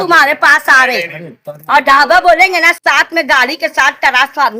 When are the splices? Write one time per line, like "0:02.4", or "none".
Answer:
none